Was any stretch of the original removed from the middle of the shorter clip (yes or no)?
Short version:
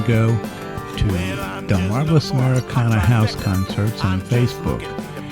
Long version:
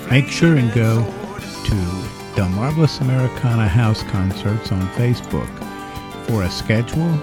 no